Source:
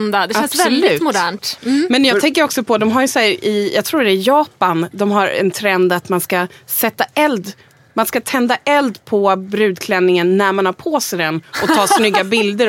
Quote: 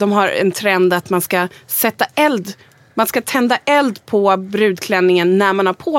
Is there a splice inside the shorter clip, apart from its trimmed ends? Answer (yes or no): no